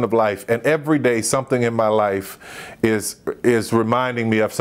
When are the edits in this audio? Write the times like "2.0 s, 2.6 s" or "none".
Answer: none